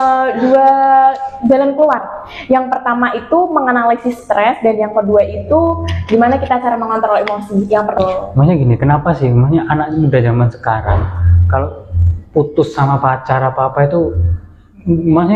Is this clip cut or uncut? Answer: cut